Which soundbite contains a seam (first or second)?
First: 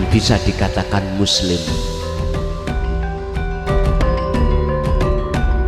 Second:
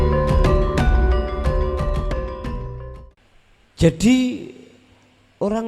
second